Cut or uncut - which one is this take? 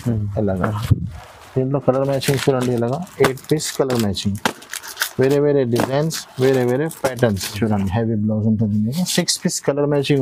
cut